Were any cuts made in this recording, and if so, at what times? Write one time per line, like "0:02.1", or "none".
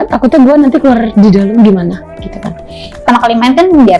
0:03.0